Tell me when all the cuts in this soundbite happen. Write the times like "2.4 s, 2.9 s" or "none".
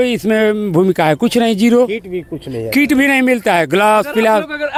none